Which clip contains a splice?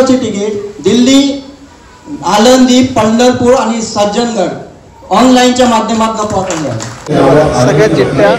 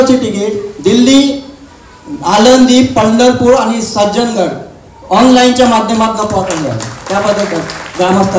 first; 1 cut; at 7.1 s

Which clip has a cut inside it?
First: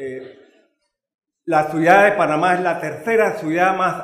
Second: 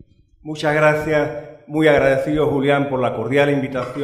first; 1 cut; at 2.3 s

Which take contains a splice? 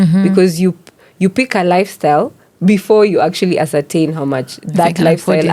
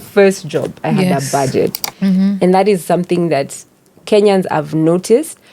second; 1 cut; at 1.9 s

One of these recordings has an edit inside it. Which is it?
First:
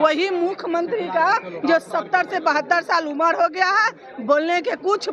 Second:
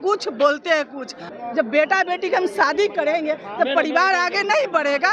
second; 1 cut; at 1.3 s

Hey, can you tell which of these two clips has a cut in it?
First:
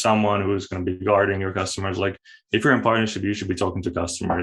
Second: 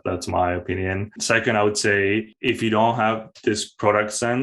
second; 2 cuts; at 1.1 s, 2.3 s

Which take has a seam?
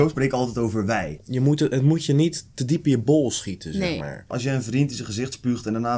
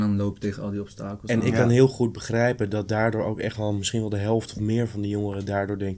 first; 2 cuts; at 1.1 s, 4.3 s

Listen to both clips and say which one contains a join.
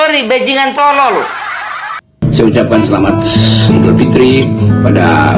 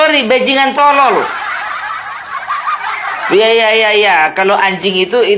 first; 1 cut; at 2.2 s

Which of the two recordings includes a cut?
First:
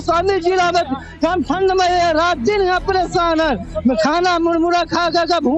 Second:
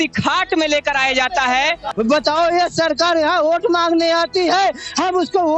second; 1 cut; at 1.8 s

